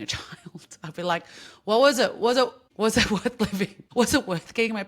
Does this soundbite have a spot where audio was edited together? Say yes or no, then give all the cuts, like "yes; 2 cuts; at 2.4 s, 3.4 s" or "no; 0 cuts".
yes; 2 cuts; at 2.7 s, 3.8 s